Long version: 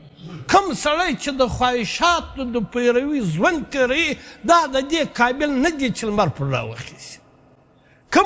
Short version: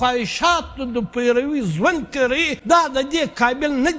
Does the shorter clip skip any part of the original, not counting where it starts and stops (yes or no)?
yes